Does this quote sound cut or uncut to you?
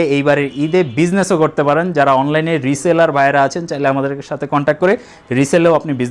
uncut